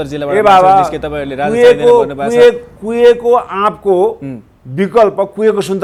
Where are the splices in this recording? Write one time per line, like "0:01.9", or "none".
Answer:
none

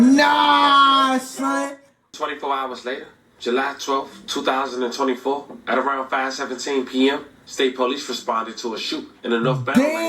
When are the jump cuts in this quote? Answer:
0:02.0

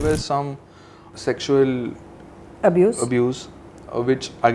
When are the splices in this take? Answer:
0:01.1

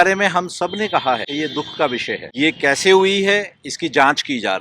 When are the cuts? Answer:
0:01.3
0:02.3

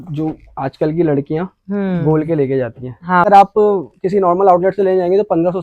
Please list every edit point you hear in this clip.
0:03.2

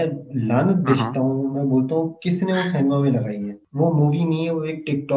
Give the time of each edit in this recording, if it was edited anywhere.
0:03.6

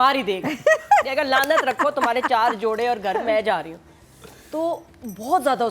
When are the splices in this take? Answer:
none

